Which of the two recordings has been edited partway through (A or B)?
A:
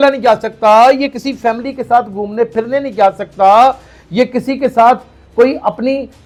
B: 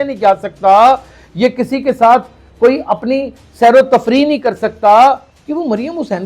B